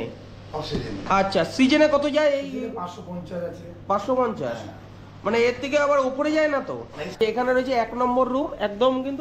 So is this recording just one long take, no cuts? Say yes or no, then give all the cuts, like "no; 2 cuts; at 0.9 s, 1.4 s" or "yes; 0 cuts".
no; 1 cut; at 7.1 s